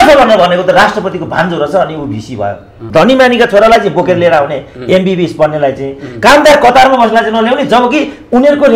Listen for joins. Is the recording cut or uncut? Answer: cut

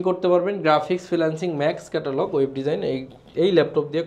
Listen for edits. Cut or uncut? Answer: uncut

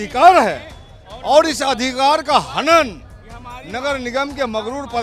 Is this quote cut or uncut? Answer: uncut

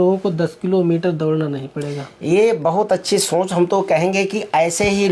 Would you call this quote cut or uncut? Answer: uncut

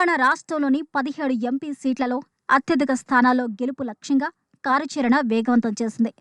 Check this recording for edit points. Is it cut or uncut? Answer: uncut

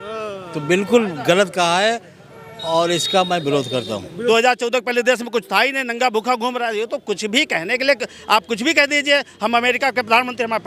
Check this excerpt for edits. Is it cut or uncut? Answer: cut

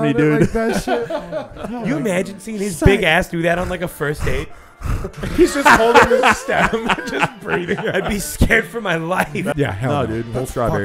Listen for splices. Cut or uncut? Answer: cut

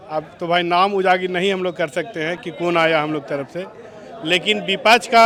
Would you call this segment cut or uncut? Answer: uncut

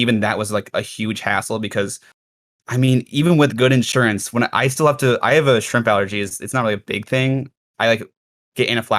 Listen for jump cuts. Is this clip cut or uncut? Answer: uncut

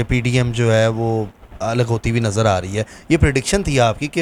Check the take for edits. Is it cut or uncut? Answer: uncut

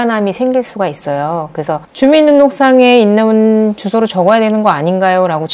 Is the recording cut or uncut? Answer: cut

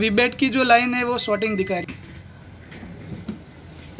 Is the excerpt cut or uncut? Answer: cut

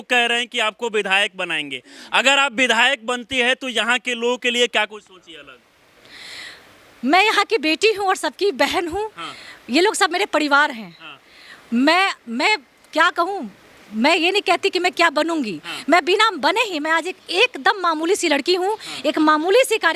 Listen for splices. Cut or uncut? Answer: uncut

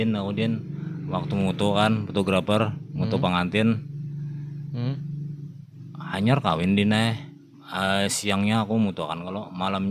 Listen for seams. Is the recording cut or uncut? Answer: uncut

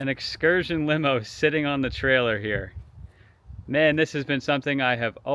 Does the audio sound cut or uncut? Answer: uncut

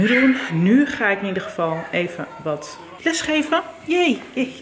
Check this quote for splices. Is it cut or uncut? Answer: uncut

